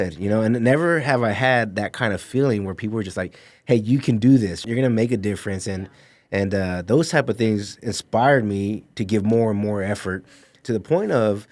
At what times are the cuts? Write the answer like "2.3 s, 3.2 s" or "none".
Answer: 4.6 s, 10.6 s

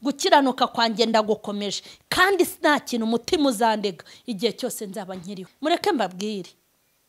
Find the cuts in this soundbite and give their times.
5.4 s

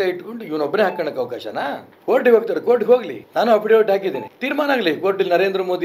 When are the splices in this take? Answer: 1.9 s, 3.2 s, 4.3 s

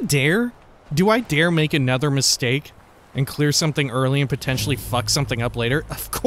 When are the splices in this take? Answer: none

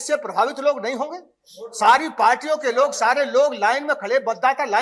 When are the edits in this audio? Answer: none

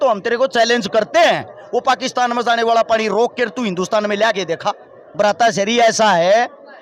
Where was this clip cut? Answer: 5.0 s

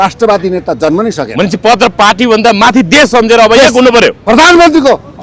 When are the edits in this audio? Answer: 4.2 s

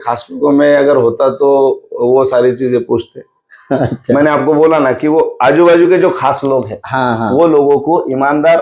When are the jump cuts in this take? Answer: none

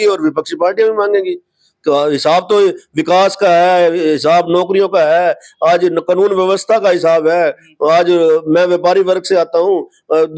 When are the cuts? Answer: none

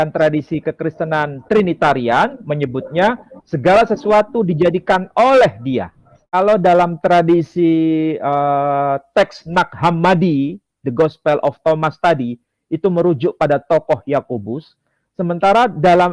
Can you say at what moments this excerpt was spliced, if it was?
6.3 s

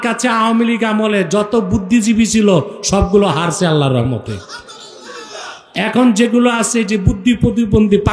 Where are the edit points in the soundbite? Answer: none

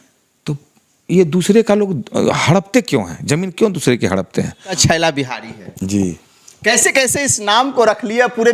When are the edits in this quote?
4.8 s

